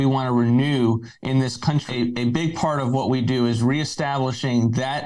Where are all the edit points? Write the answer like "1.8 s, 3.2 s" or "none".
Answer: 1.8 s